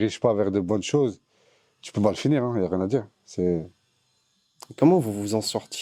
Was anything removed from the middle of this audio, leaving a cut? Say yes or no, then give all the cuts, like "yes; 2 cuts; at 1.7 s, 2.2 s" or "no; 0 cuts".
no; 0 cuts